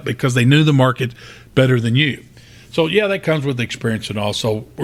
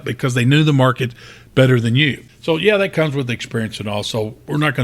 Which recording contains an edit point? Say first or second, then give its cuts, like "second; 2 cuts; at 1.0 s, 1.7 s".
second; 1 cut; at 2.3 s